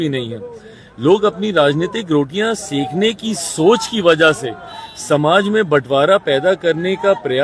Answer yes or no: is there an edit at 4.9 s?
no